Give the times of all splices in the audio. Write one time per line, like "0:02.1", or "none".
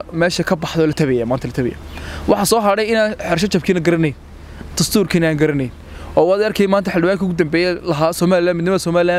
none